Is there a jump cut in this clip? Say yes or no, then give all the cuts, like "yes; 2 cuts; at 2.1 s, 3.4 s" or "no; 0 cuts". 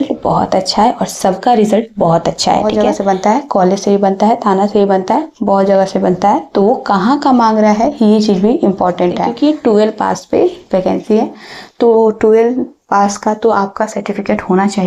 yes; 2 cuts; at 2.7 s, 9.3 s